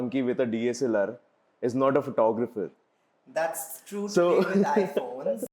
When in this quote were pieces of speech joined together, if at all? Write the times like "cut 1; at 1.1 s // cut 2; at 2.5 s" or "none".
none